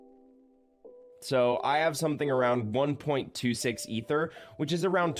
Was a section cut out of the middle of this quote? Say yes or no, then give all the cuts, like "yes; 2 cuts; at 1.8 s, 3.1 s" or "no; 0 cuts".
yes; 1 cut; at 1.2 s